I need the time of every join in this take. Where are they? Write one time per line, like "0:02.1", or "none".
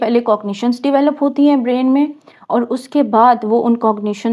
none